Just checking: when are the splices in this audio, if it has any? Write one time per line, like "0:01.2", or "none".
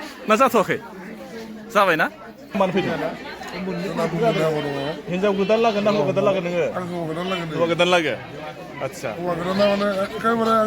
0:02.6

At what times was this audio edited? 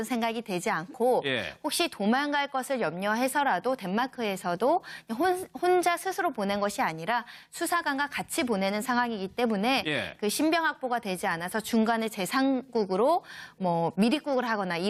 none

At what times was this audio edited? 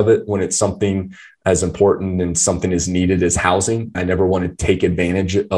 0:04.0

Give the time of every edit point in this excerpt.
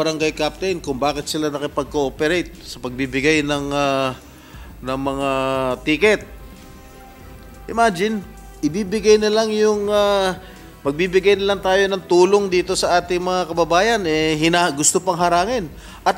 0:06.4
0:07.6

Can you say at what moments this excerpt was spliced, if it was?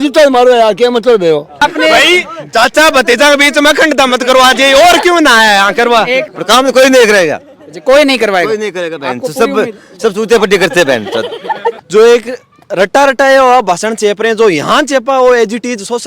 0:01.6
0:06.3
0:11.8

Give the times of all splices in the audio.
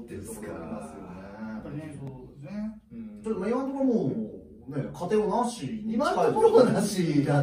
none

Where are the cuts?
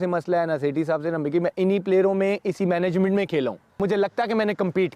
0:03.8

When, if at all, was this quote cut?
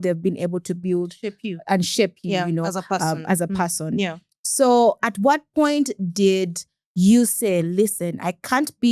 none

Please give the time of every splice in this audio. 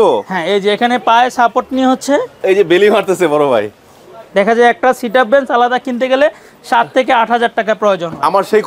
none

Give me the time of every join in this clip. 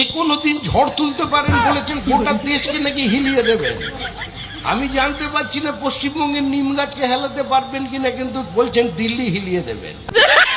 none

